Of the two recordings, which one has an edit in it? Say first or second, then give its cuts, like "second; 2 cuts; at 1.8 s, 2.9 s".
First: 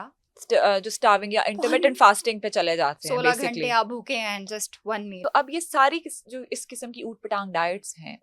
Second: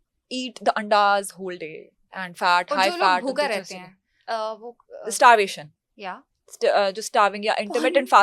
first; 1 cut; at 5.2 s